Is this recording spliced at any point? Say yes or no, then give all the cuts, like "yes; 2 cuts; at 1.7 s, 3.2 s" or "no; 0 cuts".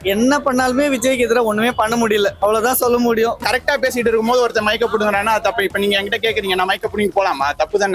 yes; 1 cut; at 3.4 s